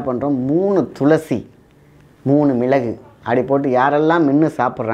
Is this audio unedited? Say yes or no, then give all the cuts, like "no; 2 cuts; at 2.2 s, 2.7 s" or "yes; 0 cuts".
yes; 0 cuts